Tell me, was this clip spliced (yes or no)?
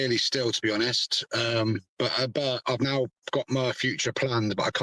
no